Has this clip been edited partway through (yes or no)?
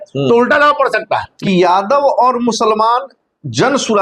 yes